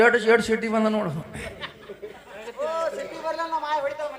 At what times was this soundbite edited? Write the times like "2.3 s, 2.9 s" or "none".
none